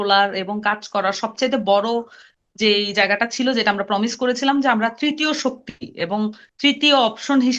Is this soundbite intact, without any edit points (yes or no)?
yes